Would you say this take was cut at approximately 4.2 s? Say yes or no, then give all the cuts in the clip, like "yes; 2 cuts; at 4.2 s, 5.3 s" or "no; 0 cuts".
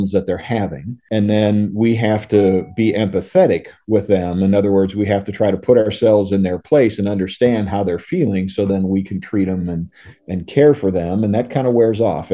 no; 1 cut; at 1.0 s